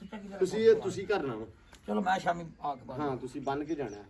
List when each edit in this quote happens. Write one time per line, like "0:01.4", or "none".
none